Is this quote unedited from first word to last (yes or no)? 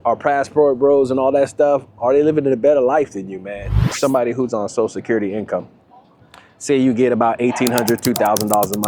no